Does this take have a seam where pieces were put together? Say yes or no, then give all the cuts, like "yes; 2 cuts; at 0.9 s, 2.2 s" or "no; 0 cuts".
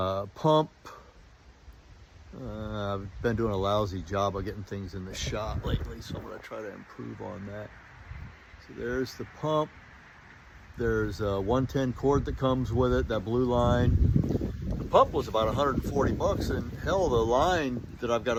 no; 0 cuts